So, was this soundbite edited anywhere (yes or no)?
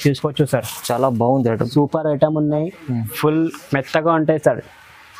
yes